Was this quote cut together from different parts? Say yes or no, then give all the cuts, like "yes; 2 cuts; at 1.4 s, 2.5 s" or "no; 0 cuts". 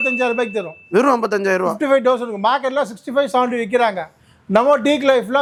no; 0 cuts